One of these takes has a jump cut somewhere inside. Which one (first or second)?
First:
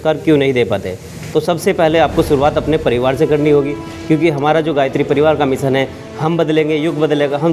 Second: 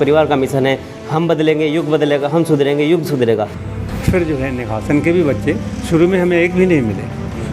second